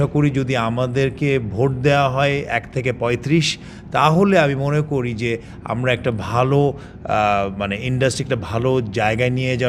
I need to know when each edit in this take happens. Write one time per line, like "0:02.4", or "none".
none